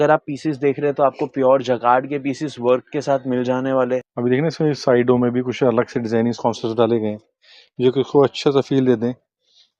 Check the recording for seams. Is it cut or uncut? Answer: cut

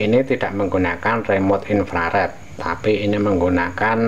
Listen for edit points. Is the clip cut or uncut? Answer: uncut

